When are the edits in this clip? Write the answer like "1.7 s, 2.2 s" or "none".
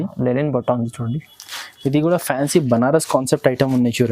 none